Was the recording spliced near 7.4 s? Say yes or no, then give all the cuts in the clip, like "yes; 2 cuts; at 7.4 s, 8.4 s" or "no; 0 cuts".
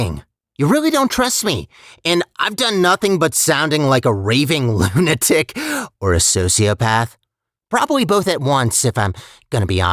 no; 0 cuts